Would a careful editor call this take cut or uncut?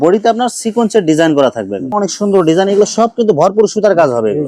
cut